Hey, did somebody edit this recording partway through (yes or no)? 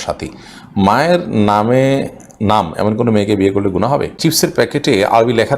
yes